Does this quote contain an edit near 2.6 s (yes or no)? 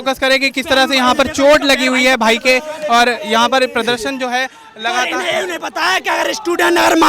no